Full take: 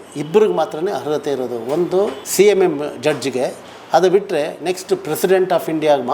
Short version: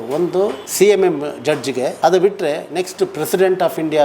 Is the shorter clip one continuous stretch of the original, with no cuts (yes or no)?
no